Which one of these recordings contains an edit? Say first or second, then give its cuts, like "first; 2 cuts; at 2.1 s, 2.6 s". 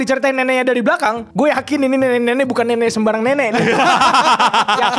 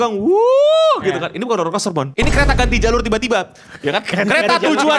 second; 1 cut; at 2.1 s